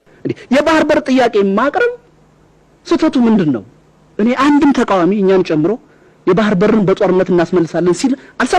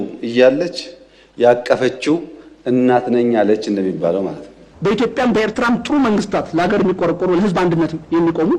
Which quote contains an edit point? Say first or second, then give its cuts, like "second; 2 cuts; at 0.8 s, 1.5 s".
second; 1 cut; at 4.6 s